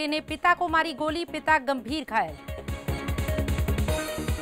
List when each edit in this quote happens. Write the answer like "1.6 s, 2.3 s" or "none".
2.5 s